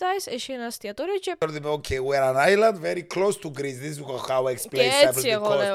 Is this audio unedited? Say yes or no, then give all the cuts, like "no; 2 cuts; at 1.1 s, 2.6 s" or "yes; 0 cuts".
no; 1 cut; at 1.4 s